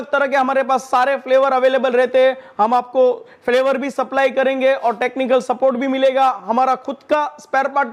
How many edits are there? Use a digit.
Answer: 0